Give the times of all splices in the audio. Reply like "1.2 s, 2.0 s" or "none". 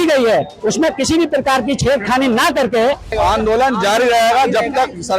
3.1 s

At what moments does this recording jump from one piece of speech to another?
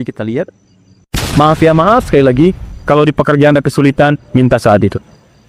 1.2 s

